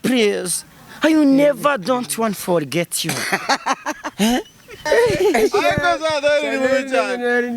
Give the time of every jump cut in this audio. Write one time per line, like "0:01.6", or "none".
0:04.8